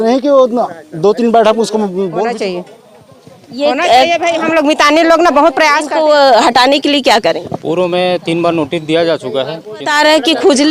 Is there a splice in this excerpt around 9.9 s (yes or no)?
yes